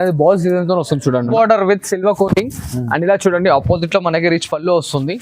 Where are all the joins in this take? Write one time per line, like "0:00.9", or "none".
0:01.3